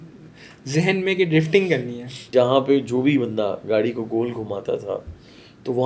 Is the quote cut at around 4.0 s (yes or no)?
no